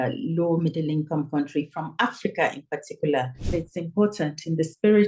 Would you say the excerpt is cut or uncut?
cut